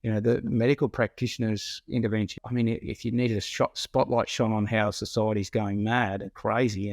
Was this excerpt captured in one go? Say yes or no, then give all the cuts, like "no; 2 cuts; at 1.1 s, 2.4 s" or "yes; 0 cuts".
no; 1 cut; at 2.4 s